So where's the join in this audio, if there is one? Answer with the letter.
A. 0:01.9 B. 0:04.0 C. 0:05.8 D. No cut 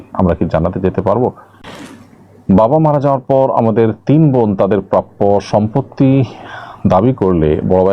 A